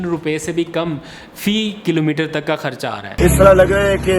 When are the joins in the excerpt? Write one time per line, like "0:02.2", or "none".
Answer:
0:03.1